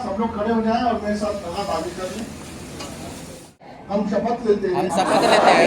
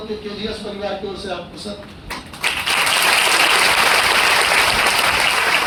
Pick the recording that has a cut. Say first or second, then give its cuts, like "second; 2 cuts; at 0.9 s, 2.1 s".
first; 1 cut; at 3.7 s